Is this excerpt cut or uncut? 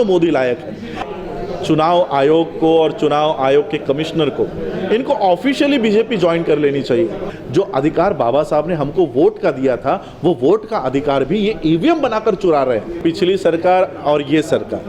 cut